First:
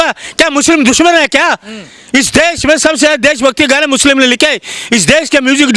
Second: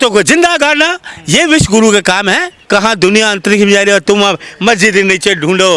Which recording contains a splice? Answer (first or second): second